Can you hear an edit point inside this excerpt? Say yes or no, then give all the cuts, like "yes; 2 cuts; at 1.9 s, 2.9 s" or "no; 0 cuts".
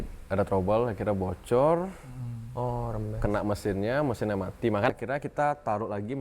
yes; 1 cut; at 4.9 s